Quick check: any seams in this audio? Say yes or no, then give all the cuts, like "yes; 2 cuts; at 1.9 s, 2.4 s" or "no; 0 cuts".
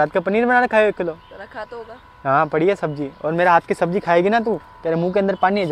no; 0 cuts